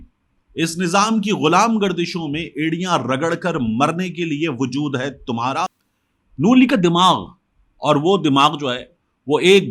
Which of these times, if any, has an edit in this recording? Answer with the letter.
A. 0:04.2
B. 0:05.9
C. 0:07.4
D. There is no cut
B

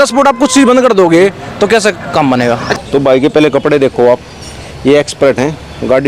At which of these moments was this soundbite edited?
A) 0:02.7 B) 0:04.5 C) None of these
A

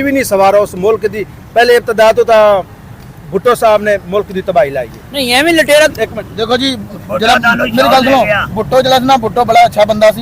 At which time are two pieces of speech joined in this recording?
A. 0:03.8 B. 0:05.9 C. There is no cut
B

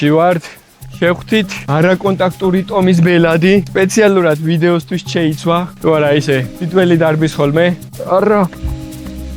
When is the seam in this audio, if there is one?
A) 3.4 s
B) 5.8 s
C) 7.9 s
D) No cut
C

